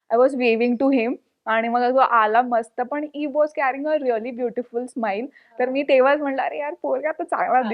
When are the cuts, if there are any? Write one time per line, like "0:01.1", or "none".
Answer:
none